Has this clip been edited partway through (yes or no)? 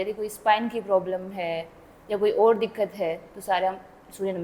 no